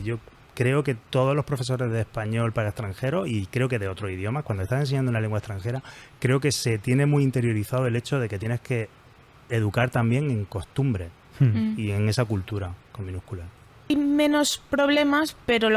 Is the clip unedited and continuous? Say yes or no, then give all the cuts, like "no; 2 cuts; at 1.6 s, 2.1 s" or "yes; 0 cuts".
no; 1 cut; at 13.9 s